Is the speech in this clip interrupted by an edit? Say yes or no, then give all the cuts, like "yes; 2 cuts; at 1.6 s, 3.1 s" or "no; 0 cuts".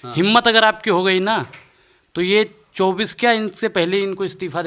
no; 0 cuts